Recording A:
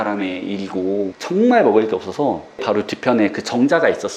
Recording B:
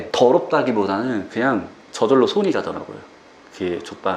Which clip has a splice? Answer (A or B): A